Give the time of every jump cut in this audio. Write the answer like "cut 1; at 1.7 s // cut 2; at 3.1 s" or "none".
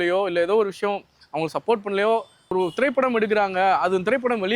cut 1; at 2.5 s